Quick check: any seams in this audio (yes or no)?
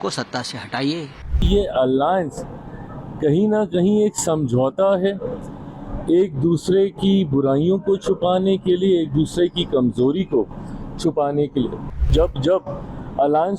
yes